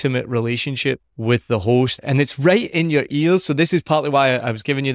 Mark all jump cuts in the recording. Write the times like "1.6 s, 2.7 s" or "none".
1.1 s, 2.0 s